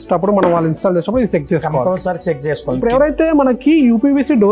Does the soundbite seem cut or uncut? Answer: cut